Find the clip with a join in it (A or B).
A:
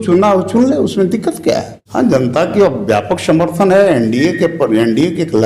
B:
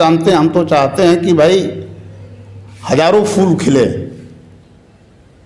A